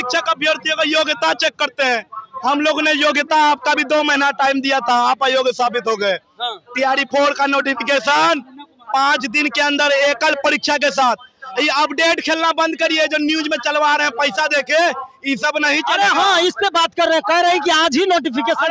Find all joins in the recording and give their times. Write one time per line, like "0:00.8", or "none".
none

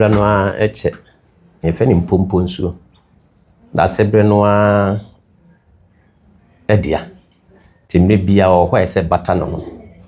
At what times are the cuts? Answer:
0:01.6

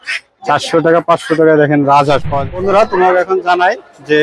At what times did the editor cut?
0:02.5

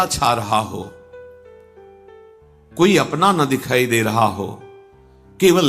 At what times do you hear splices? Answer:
0:00.9
0:02.4

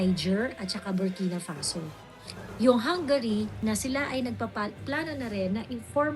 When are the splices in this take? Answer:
0:03.6

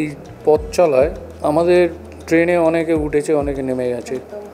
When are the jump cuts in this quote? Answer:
0:01.3
0:02.1

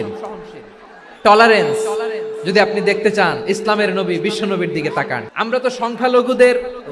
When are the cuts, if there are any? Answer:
0:05.2

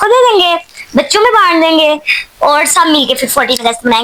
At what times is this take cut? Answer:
none

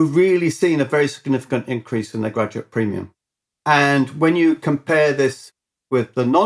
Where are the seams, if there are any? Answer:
none

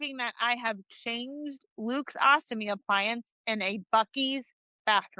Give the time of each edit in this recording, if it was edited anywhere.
none

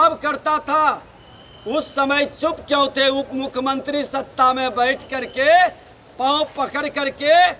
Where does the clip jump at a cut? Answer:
none

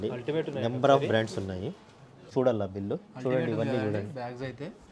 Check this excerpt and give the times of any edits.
0:02.3

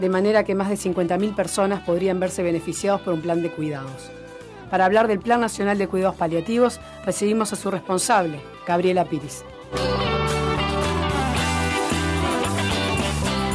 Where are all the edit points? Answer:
0:11.5

